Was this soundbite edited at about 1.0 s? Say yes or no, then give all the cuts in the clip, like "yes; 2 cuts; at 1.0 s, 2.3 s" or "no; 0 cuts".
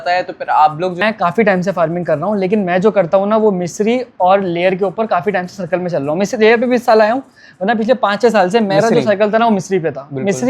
yes; 1 cut; at 1.0 s